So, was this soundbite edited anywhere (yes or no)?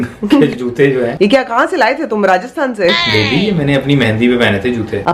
no